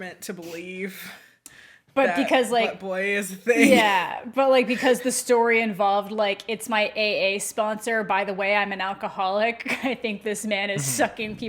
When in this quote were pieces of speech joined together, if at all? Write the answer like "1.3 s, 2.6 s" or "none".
none